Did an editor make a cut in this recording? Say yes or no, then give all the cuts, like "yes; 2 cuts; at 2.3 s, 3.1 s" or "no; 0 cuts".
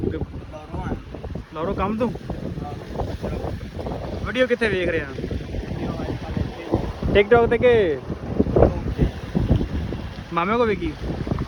no; 0 cuts